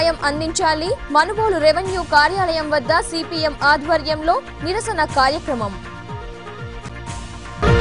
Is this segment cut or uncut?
uncut